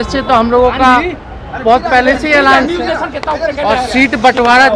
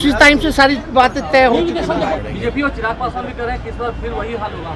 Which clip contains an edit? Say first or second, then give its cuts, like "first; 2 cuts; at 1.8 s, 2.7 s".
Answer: second; 1 cut; at 2.2 s